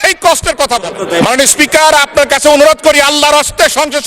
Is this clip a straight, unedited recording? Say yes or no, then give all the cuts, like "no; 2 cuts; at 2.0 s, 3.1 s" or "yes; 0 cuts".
no; 1 cut; at 1.0 s